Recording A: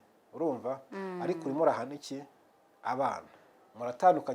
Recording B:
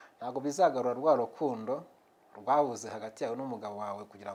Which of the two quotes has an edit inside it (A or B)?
A